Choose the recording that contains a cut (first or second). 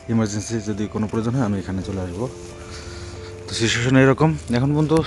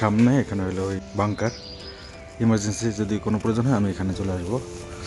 second